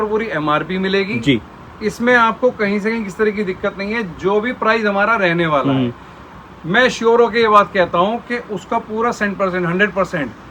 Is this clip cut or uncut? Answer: uncut